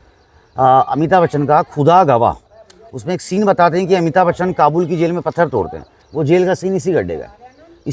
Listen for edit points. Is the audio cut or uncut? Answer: uncut